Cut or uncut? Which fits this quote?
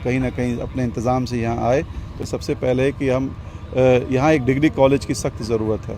cut